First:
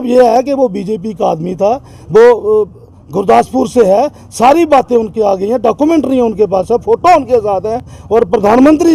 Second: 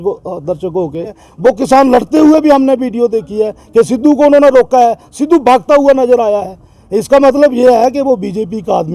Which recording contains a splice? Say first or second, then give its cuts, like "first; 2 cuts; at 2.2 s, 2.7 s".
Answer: second; 1 cut; at 1.2 s